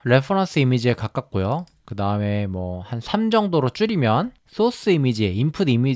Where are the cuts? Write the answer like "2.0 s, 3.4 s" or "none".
4.4 s